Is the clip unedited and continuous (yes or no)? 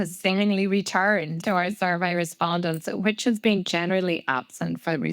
no